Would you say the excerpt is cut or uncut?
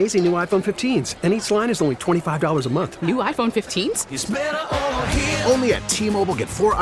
uncut